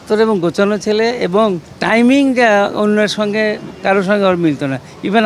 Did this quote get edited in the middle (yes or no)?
yes